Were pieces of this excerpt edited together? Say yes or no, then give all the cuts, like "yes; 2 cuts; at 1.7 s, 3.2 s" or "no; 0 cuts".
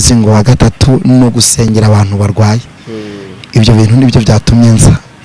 no; 0 cuts